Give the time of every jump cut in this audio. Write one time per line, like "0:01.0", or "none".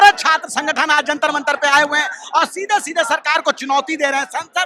none